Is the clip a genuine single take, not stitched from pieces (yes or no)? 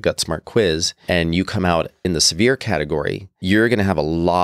no